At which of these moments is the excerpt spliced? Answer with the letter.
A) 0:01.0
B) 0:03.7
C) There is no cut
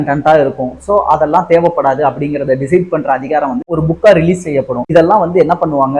B